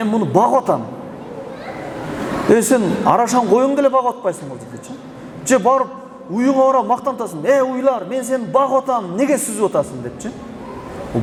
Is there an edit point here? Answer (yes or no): no